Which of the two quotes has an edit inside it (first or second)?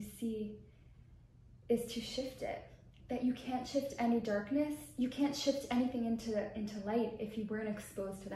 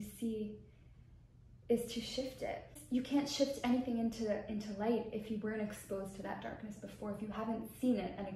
second